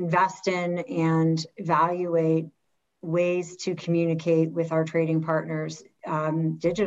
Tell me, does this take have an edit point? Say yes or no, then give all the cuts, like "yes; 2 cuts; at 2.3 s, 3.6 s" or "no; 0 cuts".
no; 0 cuts